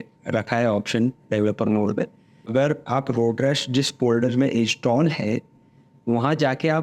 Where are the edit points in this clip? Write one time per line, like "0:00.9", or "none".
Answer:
0:02.5